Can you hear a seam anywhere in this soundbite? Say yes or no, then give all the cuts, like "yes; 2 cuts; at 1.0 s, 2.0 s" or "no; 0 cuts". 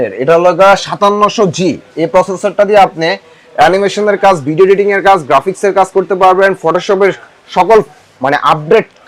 no; 0 cuts